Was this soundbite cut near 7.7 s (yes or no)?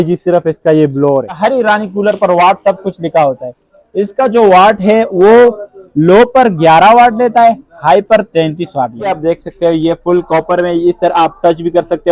no